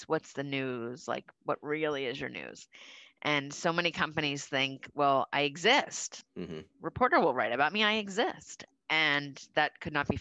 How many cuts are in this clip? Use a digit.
1